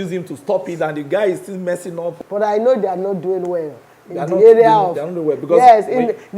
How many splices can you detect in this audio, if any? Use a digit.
1